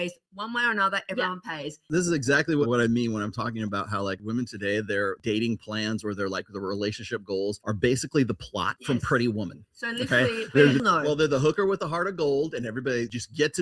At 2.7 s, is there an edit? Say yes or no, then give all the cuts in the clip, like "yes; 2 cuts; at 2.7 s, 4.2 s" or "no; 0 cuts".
yes; 1 cut; at 2.7 s